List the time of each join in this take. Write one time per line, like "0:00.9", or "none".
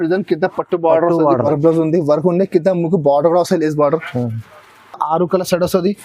0:01.4